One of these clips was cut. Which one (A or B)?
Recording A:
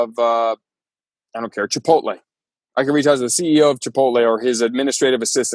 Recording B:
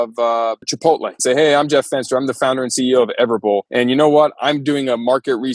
B